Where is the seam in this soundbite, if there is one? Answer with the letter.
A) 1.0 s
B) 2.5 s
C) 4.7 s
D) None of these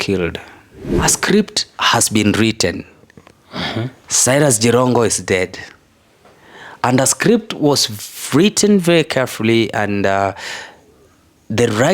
A